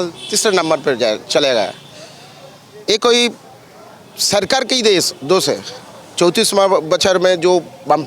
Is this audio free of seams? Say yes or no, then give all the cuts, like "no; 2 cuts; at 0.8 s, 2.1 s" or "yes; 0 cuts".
yes; 0 cuts